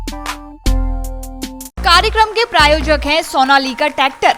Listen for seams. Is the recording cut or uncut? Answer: cut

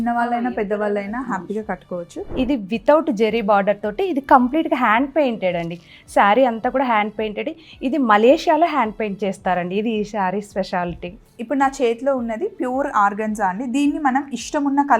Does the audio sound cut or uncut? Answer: cut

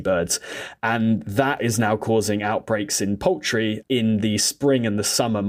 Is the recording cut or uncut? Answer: uncut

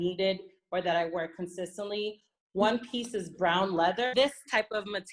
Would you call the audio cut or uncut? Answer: cut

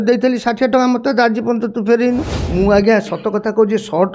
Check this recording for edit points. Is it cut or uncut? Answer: cut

